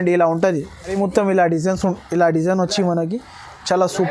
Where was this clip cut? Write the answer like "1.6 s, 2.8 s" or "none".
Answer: 0.9 s